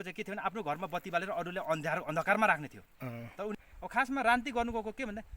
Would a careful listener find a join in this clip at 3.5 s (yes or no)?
yes